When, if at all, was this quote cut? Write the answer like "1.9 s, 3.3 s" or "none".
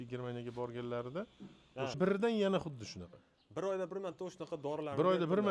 2.0 s